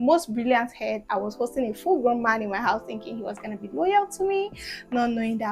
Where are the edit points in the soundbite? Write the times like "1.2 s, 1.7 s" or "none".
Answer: none